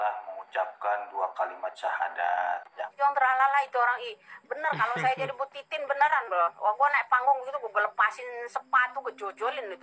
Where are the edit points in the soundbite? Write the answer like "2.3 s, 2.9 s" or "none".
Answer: 2.8 s

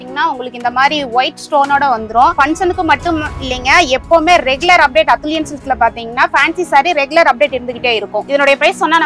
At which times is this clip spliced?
none

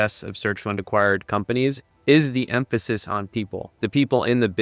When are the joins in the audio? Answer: 1.9 s

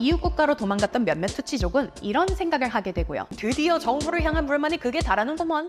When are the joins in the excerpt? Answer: 3.4 s

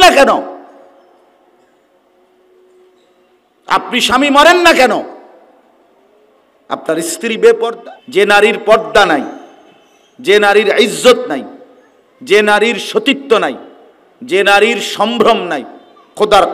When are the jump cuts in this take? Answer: 7.8 s

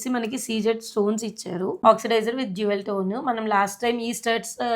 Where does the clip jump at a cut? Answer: 1.8 s

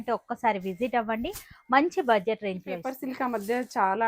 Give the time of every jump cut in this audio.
2.9 s

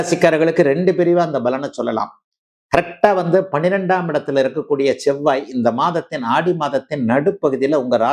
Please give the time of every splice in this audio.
none

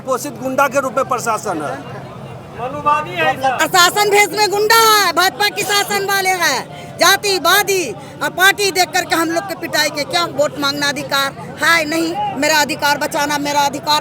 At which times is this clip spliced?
3.6 s

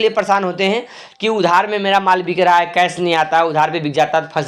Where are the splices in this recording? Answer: none

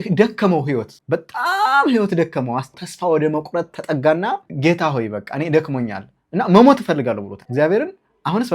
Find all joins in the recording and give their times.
0.9 s, 2.7 s, 4.5 s, 7.3 s

